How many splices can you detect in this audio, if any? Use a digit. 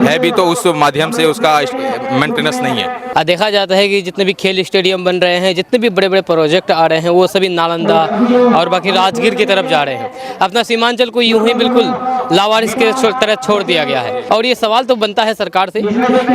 2